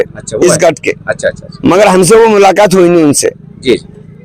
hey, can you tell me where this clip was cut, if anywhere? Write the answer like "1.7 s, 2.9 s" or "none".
none